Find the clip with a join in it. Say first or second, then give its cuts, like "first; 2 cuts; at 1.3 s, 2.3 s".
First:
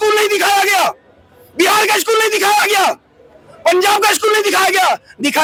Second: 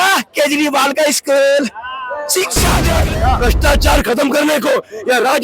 second; 1 cut; at 2.9 s